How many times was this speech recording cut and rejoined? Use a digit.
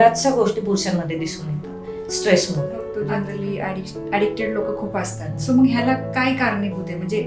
1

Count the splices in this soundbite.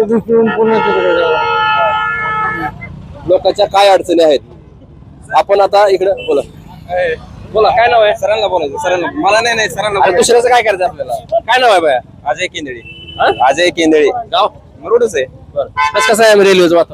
0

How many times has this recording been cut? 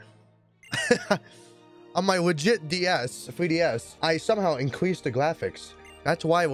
1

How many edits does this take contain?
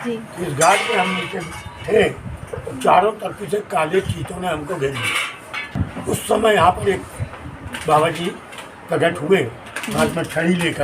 1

